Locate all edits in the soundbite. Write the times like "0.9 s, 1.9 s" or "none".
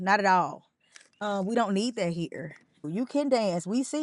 2.9 s